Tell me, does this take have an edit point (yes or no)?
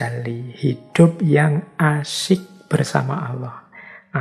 no